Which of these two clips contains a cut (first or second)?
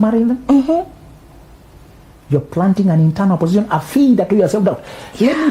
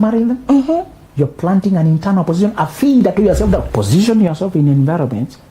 second